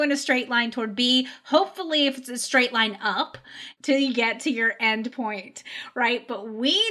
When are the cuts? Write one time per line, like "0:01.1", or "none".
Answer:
0:03.6